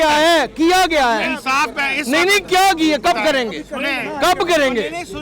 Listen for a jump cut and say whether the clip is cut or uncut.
uncut